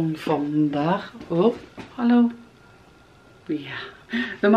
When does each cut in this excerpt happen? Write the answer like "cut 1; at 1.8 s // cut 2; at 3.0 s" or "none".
none